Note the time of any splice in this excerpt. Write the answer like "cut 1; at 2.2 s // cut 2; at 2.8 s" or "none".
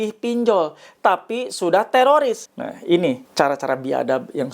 cut 1; at 2.5 s // cut 2; at 3.2 s